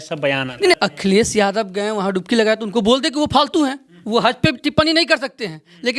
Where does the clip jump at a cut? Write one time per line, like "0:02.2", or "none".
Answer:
0:00.7
0:03.9